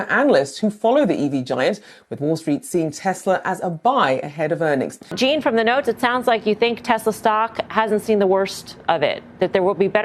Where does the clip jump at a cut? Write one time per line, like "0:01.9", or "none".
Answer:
0:05.0